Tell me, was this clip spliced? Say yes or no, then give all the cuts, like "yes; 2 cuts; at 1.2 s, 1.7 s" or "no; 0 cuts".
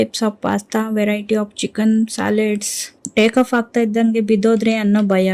yes; 1 cut; at 2.9 s